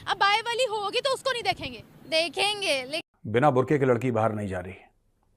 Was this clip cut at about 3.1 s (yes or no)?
yes